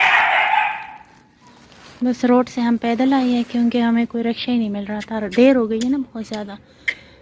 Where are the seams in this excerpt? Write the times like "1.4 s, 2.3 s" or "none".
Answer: none